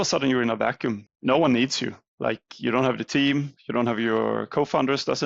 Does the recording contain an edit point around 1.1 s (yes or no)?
yes